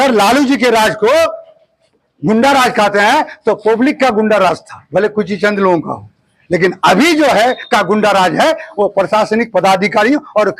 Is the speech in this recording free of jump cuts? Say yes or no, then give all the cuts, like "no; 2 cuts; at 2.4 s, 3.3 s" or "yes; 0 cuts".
yes; 0 cuts